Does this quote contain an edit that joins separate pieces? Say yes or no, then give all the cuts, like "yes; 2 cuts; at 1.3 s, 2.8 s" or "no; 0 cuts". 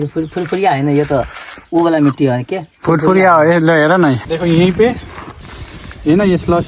yes; 1 cut; at 4.3 s